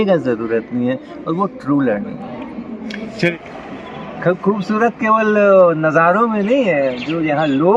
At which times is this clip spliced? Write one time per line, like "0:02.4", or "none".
0:03.3

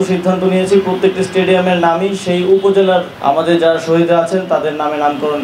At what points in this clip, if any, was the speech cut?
none

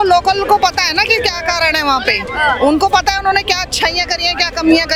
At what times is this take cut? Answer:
none

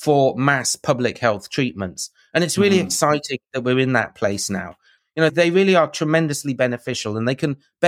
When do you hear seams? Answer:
0:05.2

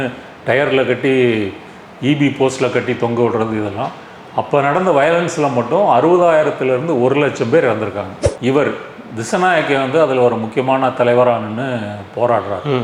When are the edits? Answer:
0:08.2

